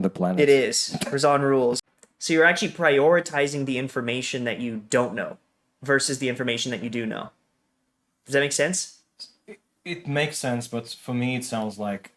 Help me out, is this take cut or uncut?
cut